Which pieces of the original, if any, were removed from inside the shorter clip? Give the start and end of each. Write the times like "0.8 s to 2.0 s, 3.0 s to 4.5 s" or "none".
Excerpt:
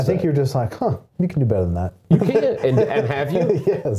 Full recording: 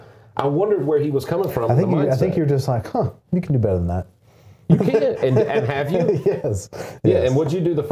4.1 s to 4.5 s